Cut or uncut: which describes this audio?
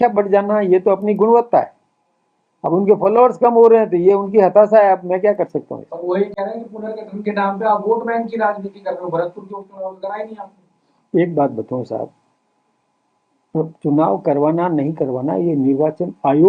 uncut